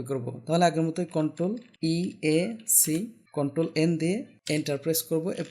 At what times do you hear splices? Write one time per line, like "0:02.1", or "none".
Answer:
0:01.7
0:03.2
0:04.3